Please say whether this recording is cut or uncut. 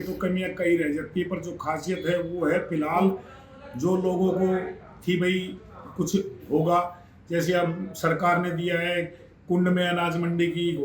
uncut